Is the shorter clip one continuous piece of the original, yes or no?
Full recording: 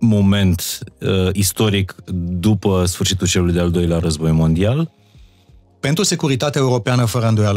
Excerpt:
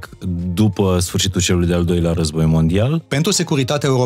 no